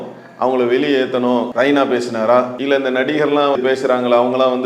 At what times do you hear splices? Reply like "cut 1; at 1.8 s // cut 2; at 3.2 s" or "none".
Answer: cut 1; at 1.5 s // cut 2; at 2.6 s // cut 3; at 3.6 s